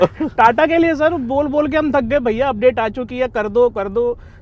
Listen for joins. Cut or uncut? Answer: uncut